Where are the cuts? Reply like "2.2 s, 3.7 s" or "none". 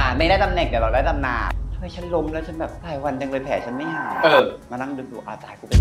1.4 s

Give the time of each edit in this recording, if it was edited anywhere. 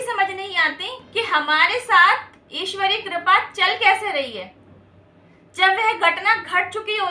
0.9 s

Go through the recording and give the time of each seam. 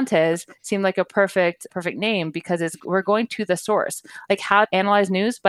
1.7 s

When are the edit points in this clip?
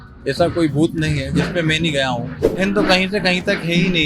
2.5 s

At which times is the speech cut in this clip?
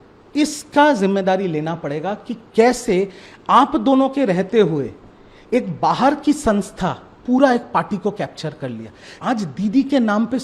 9.1 s

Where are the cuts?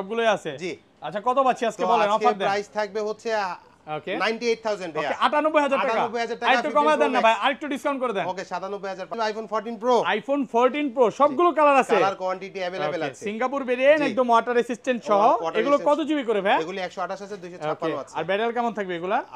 9.1 s

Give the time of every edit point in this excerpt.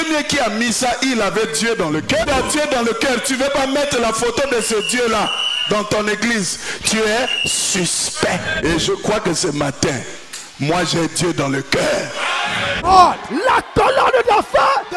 2.2 s, 8.6 s, 12.8 s

